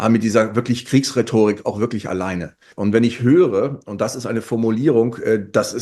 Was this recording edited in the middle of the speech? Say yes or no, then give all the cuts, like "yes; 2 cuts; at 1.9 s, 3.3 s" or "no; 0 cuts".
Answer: yes; 1 cut; at 2.6 s